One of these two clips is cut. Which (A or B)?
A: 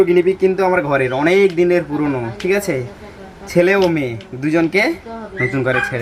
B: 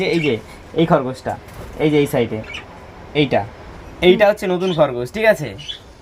B